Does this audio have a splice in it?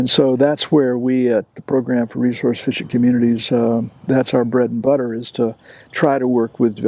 no; 0 cuts

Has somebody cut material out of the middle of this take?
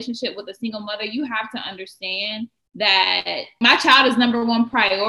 yes; 1 cut; at 3.5 s

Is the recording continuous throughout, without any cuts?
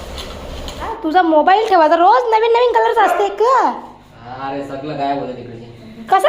no; 1 cut; at 0.9 s

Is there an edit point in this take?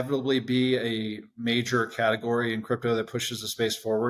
no; 0 cuts

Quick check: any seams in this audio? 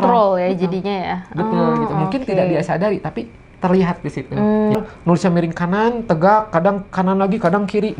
yes; 1 cut; at 4.8 s

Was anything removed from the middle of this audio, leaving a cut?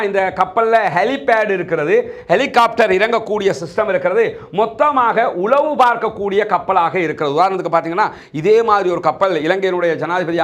no; 0 cuts

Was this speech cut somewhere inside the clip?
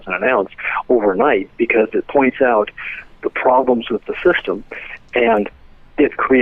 no; 0 cuts

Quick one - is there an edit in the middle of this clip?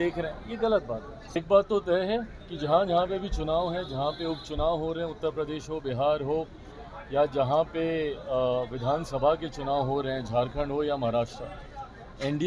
yes; 1 cut; at 1.4 s

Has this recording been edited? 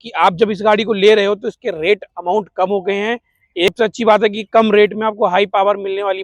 yes; 1 cut; at 3.7 s

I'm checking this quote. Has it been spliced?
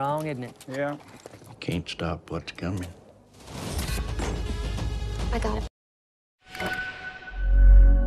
yes; 1 cut; at 5.6 s

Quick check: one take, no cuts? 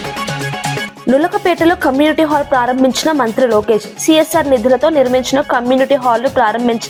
yes; 0 cuts

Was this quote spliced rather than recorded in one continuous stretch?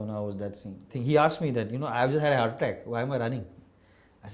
yes; 1 cut; at 0.9 s

